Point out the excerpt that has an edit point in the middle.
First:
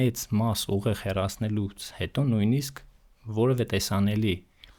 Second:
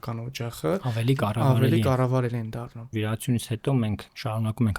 second; 1 cut; at 2.9 s

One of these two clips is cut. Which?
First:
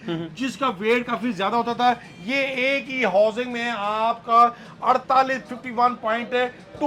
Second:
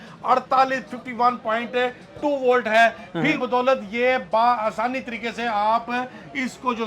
second; 1 cut; at 3.4 s

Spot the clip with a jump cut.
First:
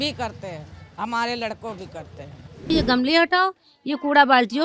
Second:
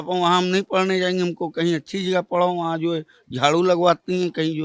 first; 1 cut; at 2.7 s

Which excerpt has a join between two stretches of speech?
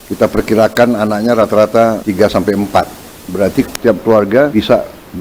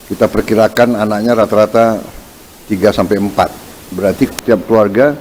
first; 2 cuts; at 2.0 s, 4.5 s

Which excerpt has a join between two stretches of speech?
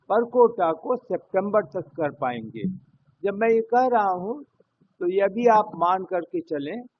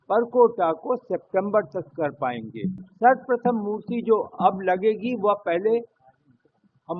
second; 1 cut; at 2.9 s

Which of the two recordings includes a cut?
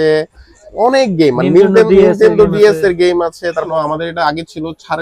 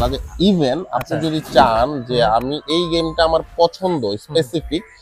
first; 1 cut; at 3.7 s

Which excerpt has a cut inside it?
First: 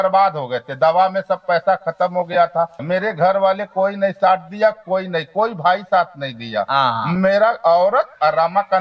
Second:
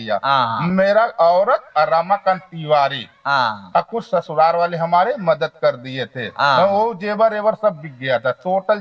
first; 1 cut; at 2.8 s

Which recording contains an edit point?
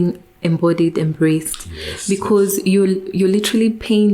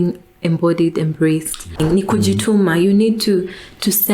second; 1 cut; at 1.7 s

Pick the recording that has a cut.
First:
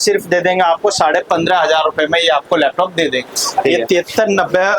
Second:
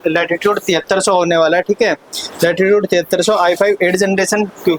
first; 1 cut; at 3.3 s

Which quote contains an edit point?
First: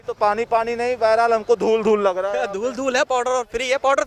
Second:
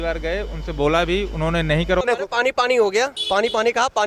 second; 1 cut; at 2.0 s

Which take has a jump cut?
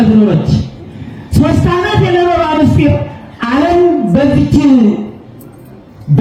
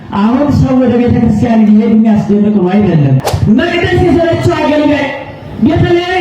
second; 1 cut; at 3.3 s

